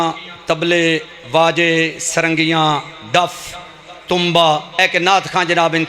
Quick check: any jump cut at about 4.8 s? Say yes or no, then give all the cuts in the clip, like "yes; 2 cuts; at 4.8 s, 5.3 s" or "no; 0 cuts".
yes; 1 cut; at 4.8 s